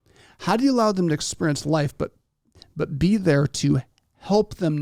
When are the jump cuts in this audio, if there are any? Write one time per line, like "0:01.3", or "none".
none